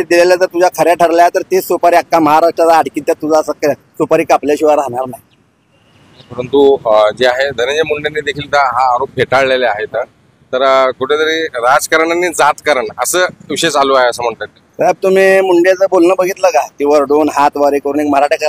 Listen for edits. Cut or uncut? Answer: uncut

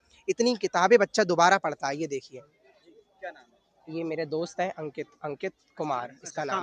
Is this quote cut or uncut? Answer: uncut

